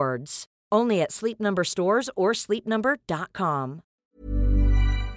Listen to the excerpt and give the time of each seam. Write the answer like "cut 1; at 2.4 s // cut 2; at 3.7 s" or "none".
cut 1; at 4.0 s

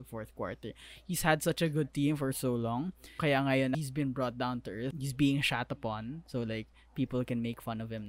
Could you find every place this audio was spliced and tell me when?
cut 1; at 3.1 s // cut 2; at 3.8 s // cut 3; at 4.9 s

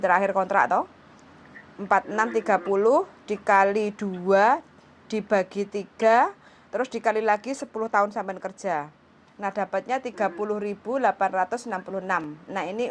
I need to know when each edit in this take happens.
none

